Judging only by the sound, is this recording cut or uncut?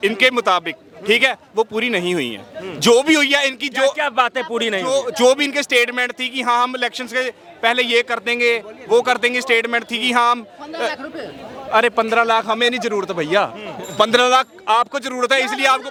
uncut